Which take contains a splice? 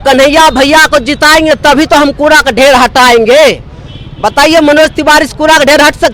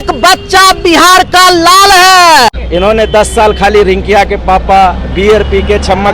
second; 1 cut; at 2.6 s

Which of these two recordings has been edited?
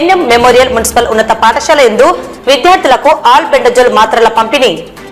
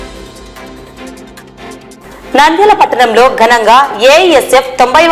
second; 1 cut; at 2.0 s

